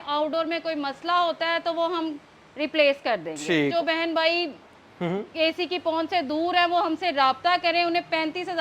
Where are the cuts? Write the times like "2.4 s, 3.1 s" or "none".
3.7 s